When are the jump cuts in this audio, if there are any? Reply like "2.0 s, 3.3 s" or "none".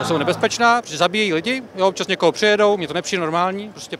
none